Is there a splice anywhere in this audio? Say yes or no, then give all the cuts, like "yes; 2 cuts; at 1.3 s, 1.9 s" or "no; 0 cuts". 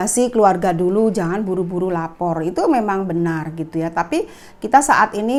no; 0 cuts